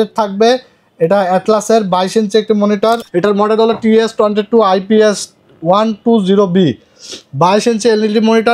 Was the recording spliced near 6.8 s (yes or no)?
no